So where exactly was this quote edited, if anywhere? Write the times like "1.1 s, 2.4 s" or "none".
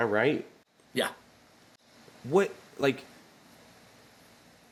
none